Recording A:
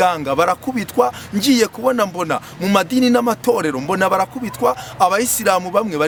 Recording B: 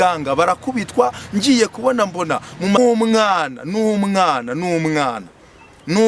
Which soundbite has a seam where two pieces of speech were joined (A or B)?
B